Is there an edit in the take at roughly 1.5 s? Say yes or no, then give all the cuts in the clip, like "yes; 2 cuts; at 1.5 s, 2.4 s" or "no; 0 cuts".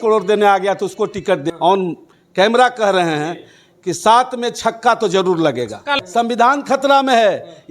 yes; 2 cuts; at 1.5 s, 6.0 s